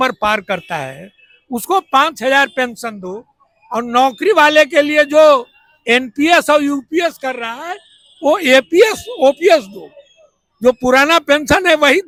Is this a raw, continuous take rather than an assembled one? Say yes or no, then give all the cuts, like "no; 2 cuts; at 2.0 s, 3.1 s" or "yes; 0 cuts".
yes; 0 cuts